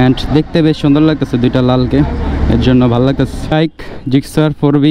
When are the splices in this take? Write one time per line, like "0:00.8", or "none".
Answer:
0:03.5